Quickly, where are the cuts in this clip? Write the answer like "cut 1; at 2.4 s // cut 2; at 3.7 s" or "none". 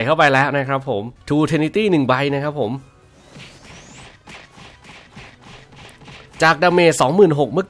cut 1; at 1.1 s

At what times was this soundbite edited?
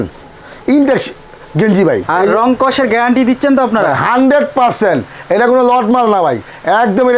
cut 1; at 2.0 s

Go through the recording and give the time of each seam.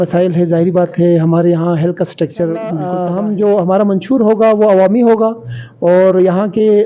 cut 1; at 2.9 s

